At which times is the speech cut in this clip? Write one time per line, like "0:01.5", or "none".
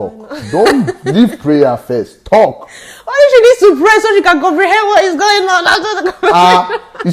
0:02.1